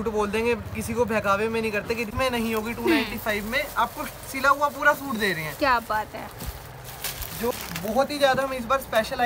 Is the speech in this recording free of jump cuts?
no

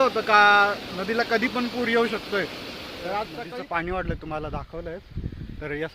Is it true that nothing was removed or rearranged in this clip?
no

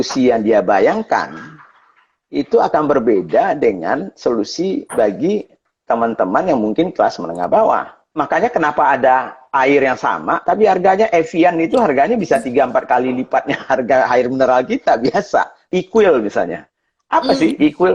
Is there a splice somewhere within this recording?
yes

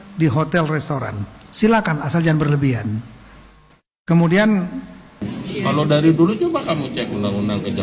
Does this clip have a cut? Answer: yes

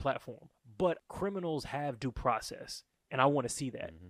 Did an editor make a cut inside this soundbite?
yes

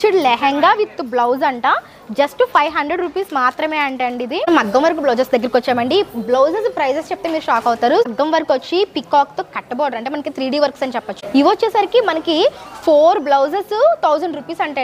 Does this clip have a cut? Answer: yes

